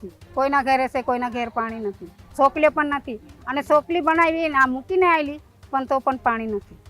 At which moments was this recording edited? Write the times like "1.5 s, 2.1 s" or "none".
none